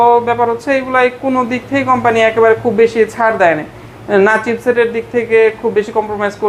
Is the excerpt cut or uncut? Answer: uncut